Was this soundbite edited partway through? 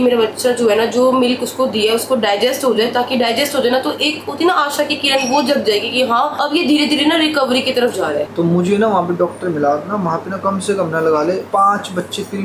no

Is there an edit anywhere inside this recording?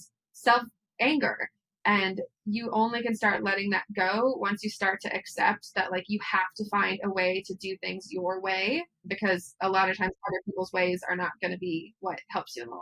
yes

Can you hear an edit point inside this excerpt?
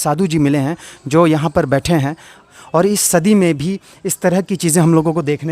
yes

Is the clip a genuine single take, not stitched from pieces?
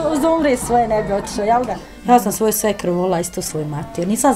no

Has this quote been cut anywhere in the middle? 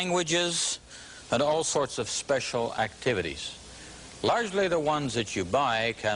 yes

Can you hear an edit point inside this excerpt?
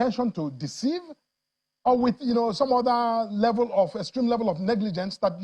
no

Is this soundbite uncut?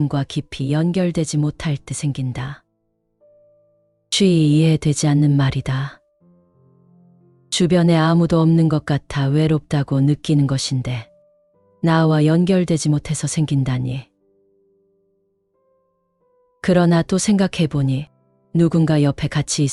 yes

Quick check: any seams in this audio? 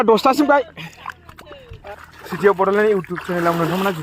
yes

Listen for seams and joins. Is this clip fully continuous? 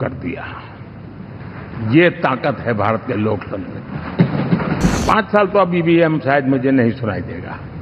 no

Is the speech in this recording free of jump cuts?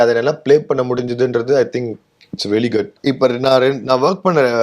no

